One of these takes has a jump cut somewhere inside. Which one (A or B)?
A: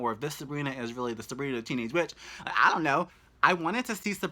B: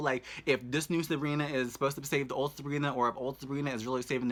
A